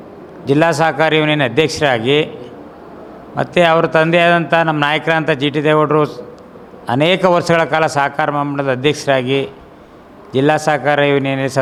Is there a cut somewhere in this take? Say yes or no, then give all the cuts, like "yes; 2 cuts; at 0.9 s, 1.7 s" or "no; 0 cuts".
no; 0 cuts